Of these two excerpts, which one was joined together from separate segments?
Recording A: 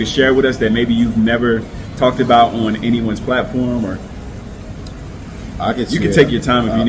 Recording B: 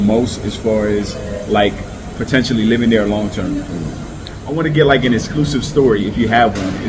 B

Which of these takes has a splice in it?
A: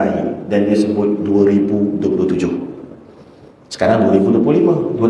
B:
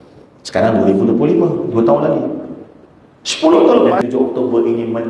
B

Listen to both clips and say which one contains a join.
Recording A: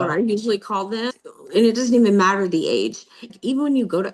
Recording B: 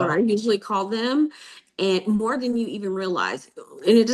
A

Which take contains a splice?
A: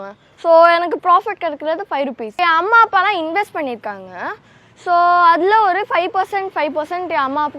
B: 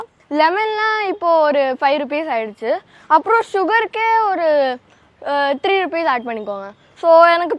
A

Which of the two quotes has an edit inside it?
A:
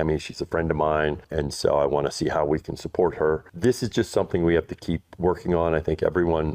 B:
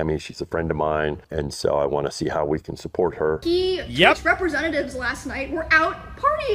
B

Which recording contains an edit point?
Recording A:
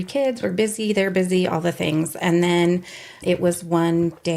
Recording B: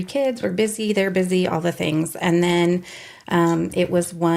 A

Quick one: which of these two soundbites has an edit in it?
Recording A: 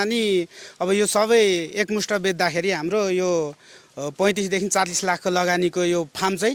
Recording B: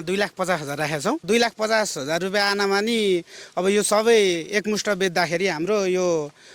B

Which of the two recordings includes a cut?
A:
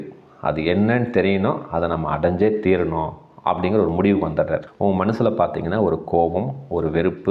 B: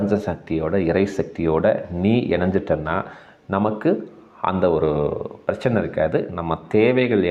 A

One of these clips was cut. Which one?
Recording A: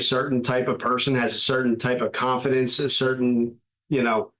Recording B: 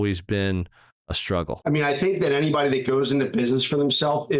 B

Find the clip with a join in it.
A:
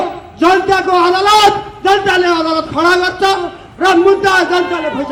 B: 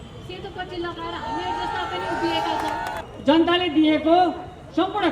B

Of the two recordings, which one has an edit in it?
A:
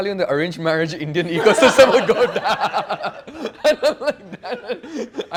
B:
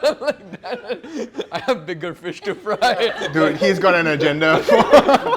B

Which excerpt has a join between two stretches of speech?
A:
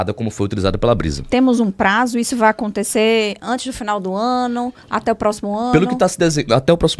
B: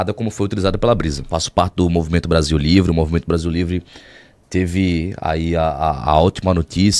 B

